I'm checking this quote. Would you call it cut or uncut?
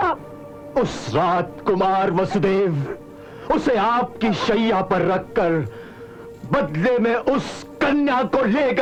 uncut